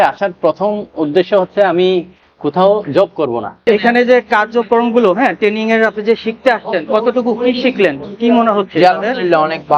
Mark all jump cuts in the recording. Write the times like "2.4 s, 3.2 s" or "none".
3.6 s